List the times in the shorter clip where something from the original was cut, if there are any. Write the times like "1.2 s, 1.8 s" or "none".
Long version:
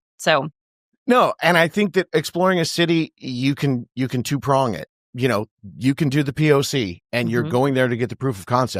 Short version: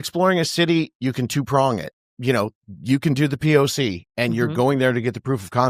0.9 s